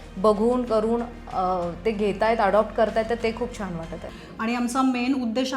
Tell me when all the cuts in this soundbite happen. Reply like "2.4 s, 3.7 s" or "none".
4.0 s